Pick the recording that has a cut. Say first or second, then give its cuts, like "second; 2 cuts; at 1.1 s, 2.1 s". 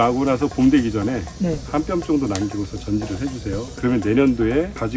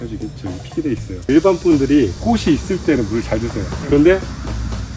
second; 1 cut; at 1.2 s